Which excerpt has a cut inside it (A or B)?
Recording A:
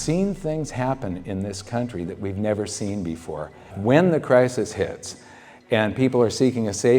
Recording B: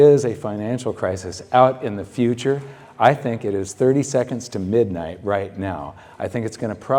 A